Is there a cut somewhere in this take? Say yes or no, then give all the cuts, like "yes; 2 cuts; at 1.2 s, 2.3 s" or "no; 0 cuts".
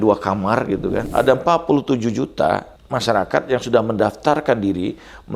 yes; 2 cuts; at 1.1 s, 2.8 s